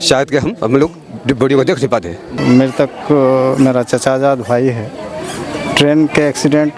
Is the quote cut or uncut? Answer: cut